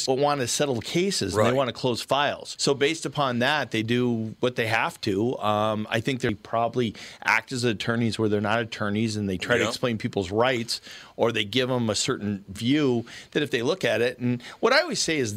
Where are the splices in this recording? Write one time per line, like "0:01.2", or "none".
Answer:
0:06.3